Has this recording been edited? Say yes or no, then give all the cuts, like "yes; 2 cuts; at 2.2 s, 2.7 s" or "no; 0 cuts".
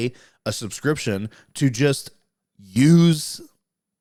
no; 0 cuts